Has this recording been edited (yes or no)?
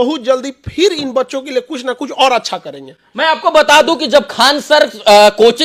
no